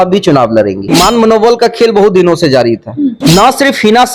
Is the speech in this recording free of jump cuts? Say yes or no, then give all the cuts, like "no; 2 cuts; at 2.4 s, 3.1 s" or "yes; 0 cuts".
no; 2 cuts; at 0.9 s, 3.2 s